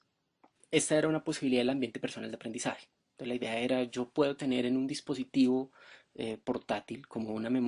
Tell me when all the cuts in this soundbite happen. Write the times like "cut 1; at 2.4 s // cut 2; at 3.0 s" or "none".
none